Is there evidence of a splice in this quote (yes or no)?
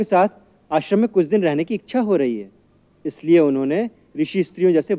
no